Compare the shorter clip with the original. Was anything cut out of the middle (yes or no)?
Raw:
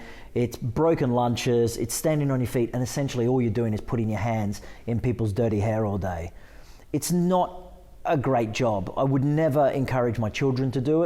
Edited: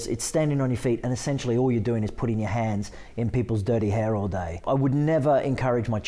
yes